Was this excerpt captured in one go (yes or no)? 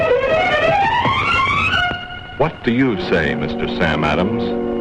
yes